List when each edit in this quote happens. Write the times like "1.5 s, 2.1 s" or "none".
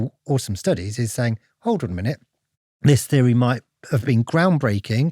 4.0 s